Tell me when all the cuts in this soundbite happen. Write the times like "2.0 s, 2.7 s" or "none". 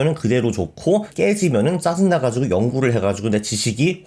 1.1 s